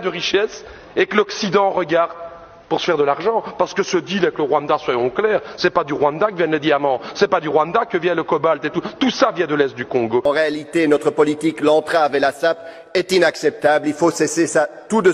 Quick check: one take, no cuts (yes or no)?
no